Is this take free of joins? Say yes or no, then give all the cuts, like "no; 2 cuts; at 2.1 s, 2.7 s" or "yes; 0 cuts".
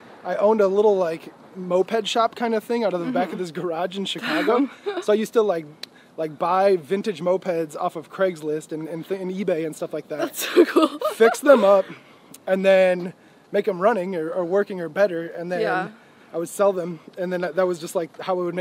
yes; 0 cuts